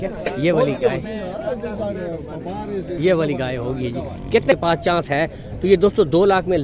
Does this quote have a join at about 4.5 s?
yes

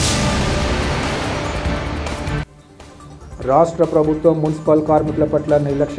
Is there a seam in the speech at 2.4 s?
yes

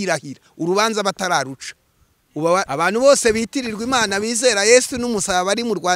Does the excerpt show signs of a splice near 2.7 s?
yes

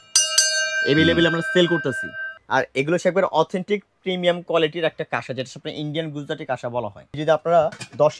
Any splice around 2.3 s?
yes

